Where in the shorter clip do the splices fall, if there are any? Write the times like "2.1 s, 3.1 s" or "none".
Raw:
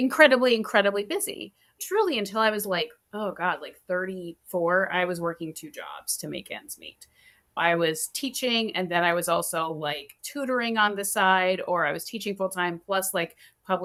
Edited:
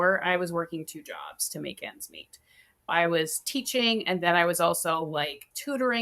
none

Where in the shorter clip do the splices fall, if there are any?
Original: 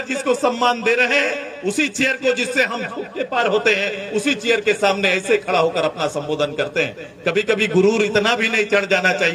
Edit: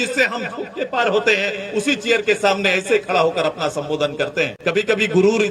4.5 s

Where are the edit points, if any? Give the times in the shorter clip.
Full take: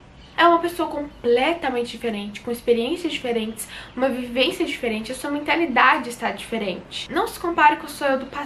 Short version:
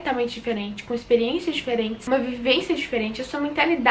2.0 s

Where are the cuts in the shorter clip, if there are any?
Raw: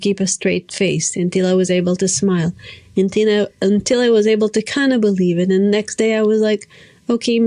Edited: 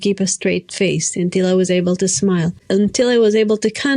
2.6 s

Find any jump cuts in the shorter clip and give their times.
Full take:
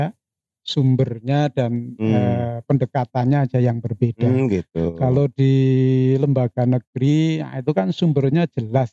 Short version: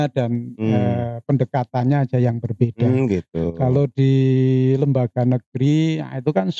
none

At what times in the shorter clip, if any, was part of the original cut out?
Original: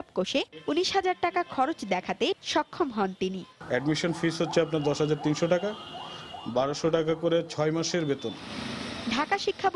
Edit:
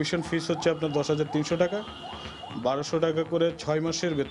none

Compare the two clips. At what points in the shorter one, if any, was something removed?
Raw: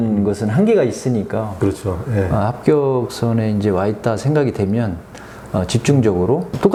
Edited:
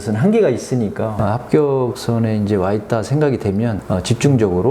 1.2 s, 3.8 s

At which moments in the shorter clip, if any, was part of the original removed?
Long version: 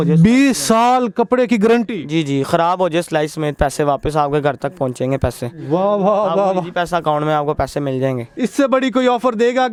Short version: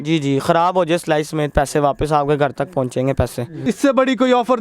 3.5 s

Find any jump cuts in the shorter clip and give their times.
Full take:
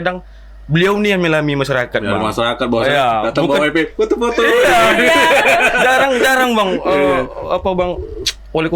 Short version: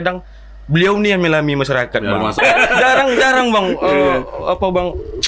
2.4 s

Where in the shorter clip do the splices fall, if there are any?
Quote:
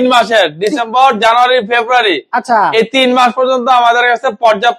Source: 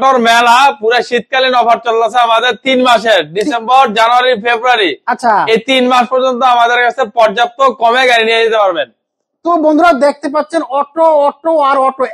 none

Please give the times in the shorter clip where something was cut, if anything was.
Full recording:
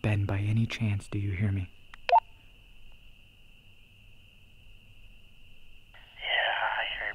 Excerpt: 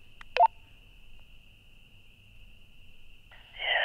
2.4 s

